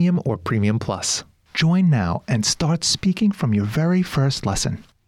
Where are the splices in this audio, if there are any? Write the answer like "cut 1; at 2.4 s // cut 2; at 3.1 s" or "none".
cut 1; at 1.2 s